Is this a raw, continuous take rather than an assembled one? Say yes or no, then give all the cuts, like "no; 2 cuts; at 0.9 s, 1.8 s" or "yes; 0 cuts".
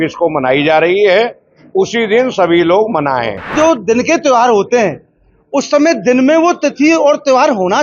no; 1 cut; at 3.5 s